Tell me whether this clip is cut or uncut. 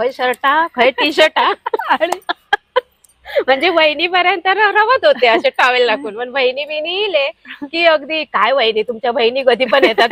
uncut